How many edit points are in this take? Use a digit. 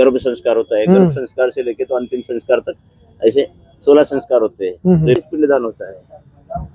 1